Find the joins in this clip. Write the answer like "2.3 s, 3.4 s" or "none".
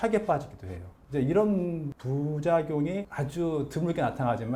none